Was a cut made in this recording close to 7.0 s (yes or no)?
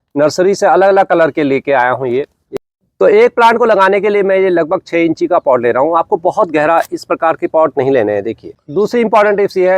no